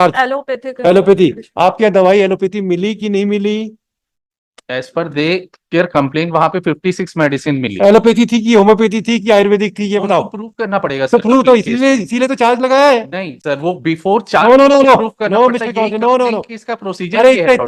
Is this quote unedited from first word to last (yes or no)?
yes